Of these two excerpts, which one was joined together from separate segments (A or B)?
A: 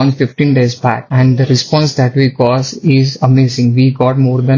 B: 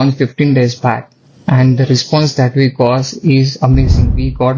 A